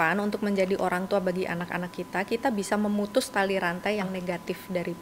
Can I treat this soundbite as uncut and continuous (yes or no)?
yes